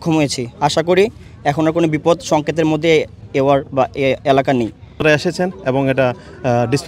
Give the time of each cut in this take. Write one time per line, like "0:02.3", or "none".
0:05.0